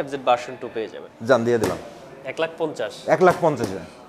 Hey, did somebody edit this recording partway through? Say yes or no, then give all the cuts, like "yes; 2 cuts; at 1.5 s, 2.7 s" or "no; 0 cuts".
yes; 1 cut; at 1.1 s